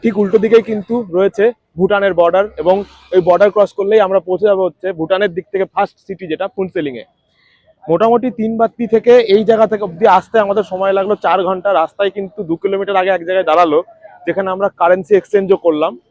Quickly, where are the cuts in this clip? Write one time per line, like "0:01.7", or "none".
none